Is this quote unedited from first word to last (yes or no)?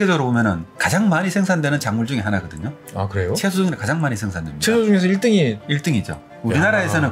yes